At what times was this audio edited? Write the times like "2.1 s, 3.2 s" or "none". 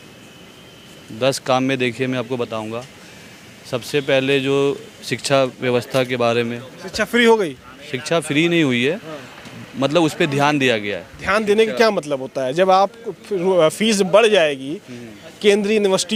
none